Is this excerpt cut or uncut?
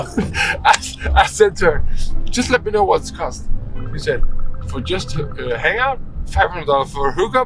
uncut